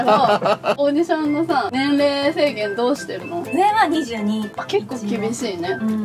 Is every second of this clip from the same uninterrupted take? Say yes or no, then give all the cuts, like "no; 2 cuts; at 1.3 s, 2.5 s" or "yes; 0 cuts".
no; 4 cuts; at 0.8 s, 1.7 s, 3.5 s, 4.6 s